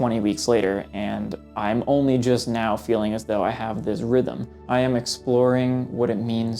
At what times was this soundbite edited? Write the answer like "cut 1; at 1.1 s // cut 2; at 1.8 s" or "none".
cut 1; at 4.7 s